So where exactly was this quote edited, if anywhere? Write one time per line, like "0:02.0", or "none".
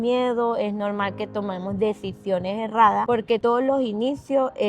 0:03.2